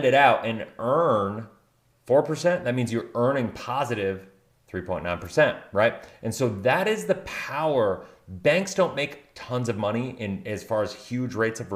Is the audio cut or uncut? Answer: uncut